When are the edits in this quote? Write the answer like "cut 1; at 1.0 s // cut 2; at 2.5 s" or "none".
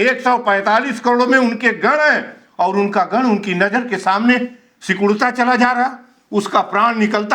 none

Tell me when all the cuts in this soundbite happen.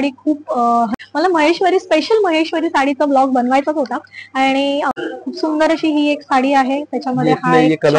cut 1; at 0.9 s // cut 2; at 4.9 s

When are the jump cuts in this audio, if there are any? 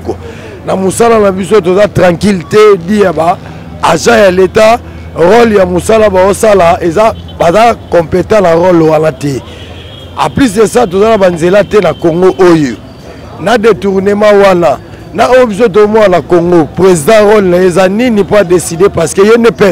none

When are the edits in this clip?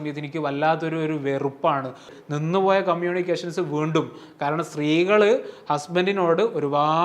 cut 1; at 2.1 s

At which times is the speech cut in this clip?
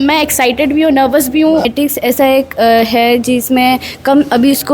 cut 1; at 1.6 s

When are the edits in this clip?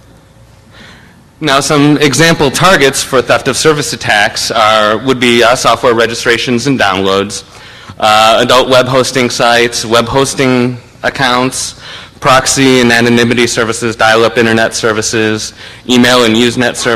none

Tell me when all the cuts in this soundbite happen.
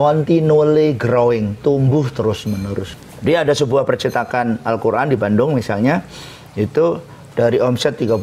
cut 1; at 2.9 s

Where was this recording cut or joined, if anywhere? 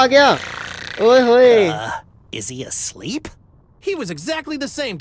none

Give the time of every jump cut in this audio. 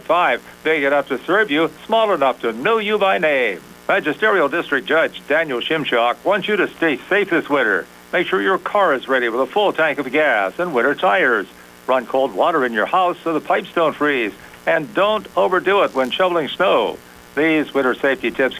cut 1; at 3.7 s

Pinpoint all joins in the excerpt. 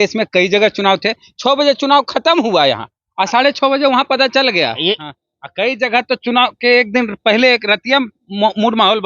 cut 1; at 5.0 s

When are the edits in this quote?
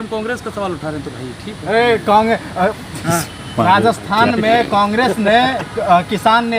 none

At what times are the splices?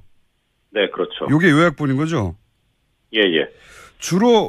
cut 1; at 1.6 s

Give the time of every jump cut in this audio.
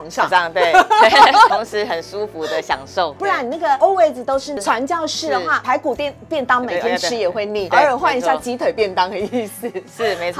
cut 1; at 1.5 s // cut 2; at 3.2 s // cut 3; at 4.6 s // cut 4; at 5.6 s // cut 5; at 7.7 s

